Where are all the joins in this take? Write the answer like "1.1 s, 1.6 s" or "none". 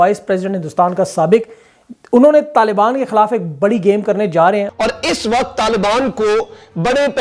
4.7 s

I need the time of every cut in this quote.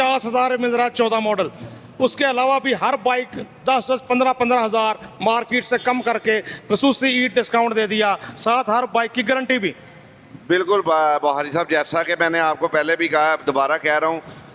none

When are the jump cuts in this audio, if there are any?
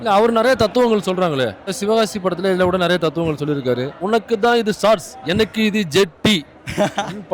1.8 s, 4.0 s

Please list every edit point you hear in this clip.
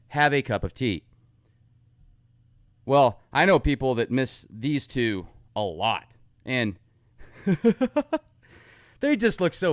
4.9 s

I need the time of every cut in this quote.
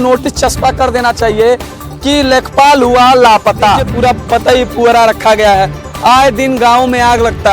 3.9 s

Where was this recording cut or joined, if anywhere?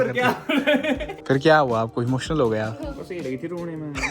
1.1 s

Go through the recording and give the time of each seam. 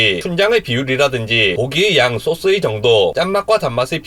none

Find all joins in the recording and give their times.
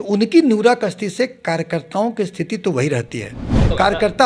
none

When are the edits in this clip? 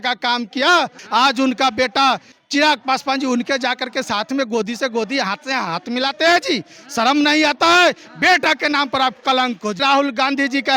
1.0 s, 2.3 s, 9.8 s

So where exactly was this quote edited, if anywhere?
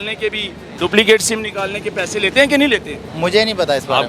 3.0 s

